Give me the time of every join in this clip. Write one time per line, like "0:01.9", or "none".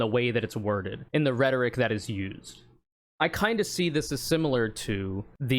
0:03.1